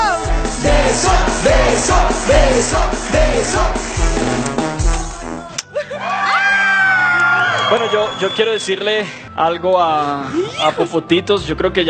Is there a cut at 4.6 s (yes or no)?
yes